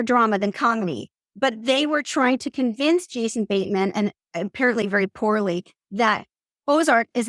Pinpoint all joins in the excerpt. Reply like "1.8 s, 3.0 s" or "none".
none